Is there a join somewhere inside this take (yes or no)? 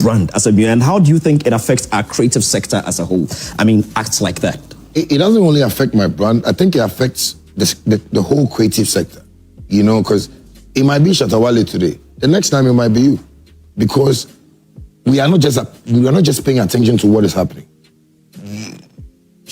no